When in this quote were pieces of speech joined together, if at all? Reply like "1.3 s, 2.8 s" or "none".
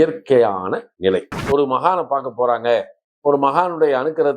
1.4 s